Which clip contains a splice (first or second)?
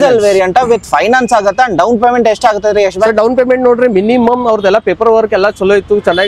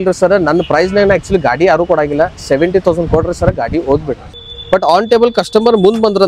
second